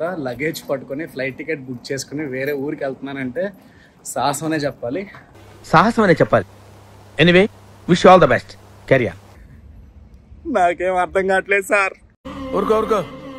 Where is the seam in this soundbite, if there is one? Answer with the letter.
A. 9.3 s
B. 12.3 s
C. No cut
A